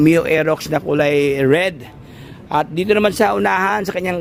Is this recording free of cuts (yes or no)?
yes